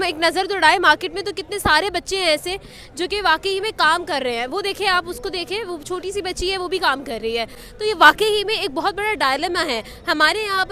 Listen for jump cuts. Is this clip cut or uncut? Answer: uncut